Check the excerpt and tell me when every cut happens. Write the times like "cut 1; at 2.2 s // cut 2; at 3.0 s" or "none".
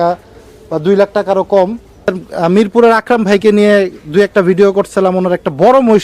cut 1; at 2.1 s